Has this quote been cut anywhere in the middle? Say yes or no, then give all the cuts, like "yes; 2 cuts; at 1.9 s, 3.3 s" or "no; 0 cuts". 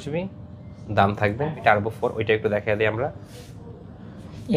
yes; 1 cut; at 1.6 s